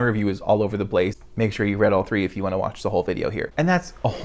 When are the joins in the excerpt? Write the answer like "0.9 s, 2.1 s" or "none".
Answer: 1.2 s, 3.5 s

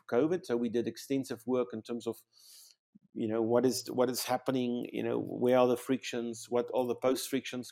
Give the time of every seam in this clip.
none

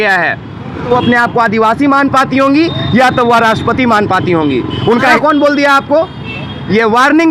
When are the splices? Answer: 0.9 s, 5.1 s

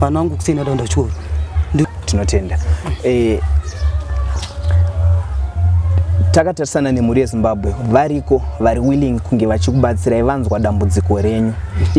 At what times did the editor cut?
1.8 s

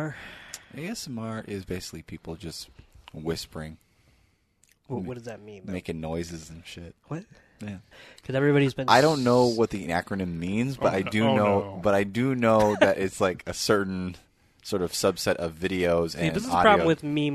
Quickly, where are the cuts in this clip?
7.9 s

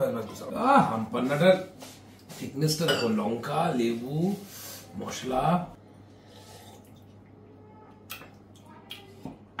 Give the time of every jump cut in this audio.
none

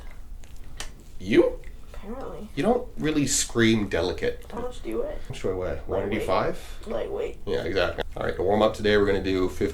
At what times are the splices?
5.1 s, 8.0 s

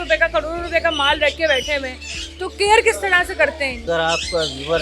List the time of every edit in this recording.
3.9 s

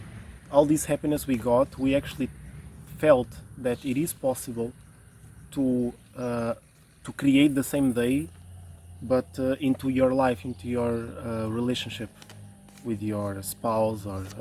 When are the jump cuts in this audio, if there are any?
none

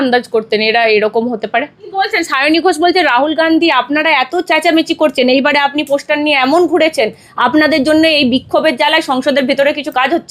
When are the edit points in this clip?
1.8 s

